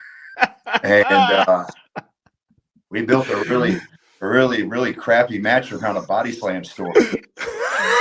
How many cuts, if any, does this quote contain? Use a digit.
0